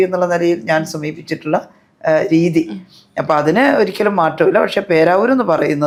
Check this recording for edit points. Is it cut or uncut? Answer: uncut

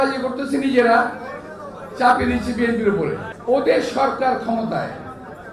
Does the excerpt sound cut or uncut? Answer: cut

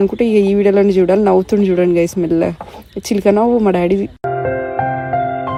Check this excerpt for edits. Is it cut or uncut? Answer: uncut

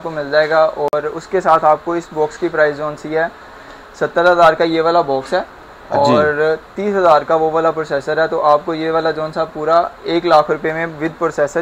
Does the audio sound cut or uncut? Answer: uncut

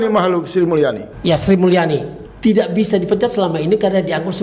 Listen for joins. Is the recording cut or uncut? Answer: cut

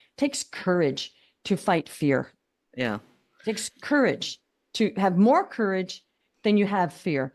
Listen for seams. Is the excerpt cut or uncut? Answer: uncut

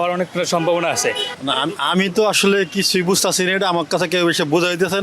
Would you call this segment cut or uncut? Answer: cut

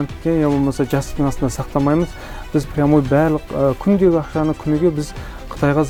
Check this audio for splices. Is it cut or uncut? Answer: uncut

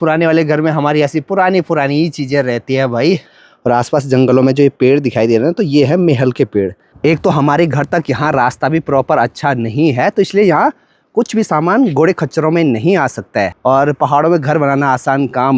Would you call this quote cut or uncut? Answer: cut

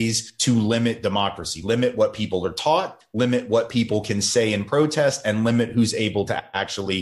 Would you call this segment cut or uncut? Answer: uncut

